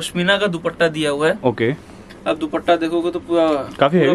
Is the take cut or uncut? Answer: uncut